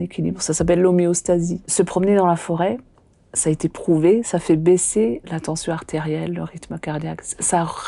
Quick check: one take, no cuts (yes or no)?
no